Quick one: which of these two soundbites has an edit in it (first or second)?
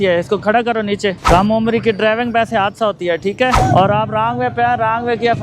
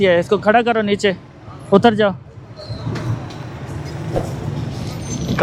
first